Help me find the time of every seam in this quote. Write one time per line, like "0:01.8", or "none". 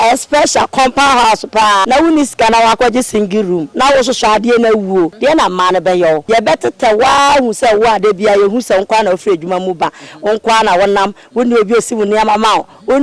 0:01.8
0:03.7
0:05.1
0:06.2